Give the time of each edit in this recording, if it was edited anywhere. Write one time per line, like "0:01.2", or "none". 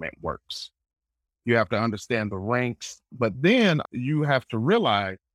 0:01.3
0:03.1
0:03.8